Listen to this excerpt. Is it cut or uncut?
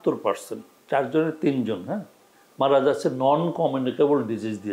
uncut